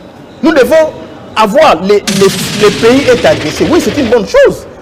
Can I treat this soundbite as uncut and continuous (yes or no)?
no